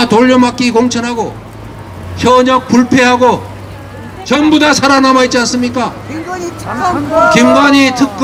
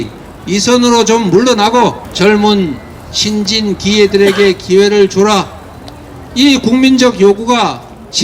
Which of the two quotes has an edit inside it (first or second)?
second